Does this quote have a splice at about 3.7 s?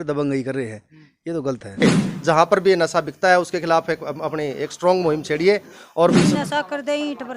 no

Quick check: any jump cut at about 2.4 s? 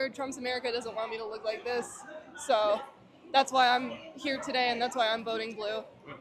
yes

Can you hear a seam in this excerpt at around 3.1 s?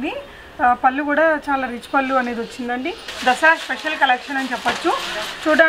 yes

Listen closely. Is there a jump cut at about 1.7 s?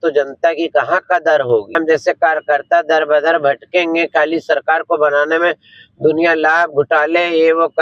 yes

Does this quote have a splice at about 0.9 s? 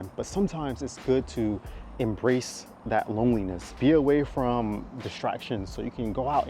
no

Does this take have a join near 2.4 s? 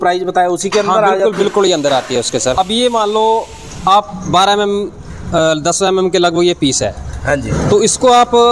yes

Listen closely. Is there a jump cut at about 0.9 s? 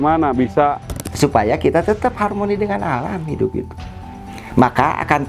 yes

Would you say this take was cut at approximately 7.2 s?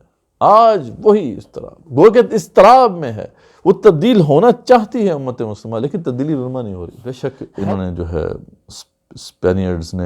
yes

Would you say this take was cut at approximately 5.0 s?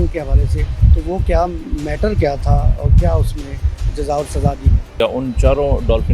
yes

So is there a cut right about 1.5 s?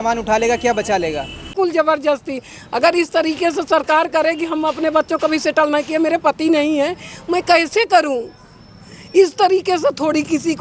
yes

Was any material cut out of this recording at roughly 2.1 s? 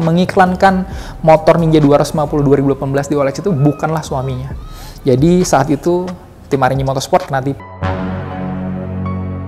no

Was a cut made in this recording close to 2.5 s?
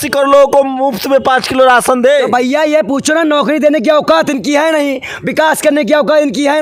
no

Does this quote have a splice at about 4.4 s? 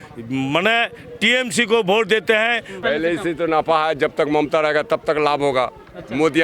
no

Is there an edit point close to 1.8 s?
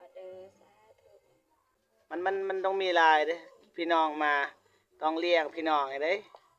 yes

